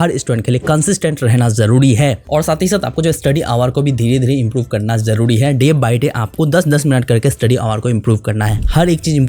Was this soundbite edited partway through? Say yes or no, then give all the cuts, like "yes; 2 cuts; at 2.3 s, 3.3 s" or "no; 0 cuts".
no; 0 cuts